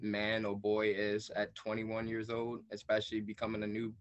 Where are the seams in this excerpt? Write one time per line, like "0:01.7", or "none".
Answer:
none